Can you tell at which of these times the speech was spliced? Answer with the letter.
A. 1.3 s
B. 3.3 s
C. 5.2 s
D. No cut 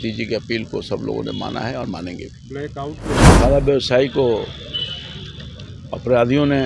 B